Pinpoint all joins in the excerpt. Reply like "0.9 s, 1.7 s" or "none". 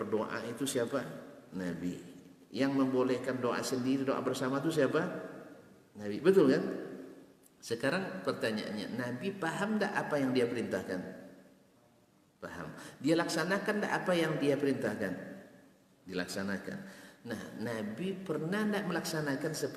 none